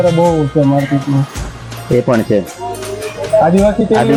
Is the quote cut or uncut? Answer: uncut